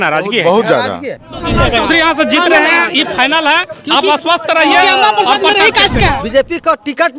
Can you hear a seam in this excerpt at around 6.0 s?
yes; 2 cuts; at 1.4 s, 6.0 s

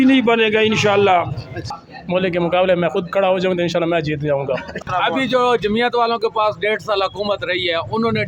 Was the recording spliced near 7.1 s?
no; 2 cuts; at 1.7 s, 4.9 s

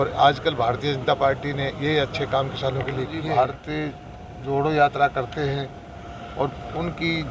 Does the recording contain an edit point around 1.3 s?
no; 1 cut; at 3.2 s

